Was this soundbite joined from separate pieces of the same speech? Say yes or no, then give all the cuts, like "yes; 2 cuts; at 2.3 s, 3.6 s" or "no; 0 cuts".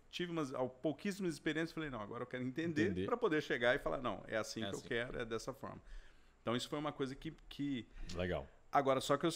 no; 0 cuts